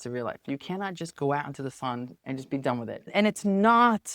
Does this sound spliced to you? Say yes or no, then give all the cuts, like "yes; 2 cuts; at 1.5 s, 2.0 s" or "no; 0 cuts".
yes; 2 cuts; at 2.1 s, 3.0 s